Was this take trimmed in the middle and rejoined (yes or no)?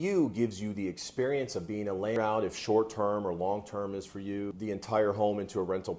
yes